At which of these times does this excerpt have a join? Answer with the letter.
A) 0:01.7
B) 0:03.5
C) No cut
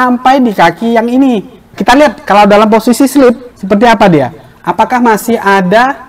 A